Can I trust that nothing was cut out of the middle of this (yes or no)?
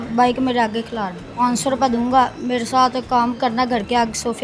no